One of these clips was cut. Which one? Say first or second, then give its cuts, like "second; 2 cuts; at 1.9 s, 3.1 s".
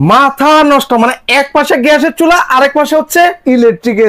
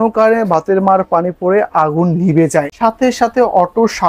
second; 1 cut; at 2.7 s